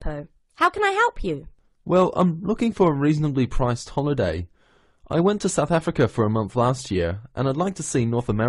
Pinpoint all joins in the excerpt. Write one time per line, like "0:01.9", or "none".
none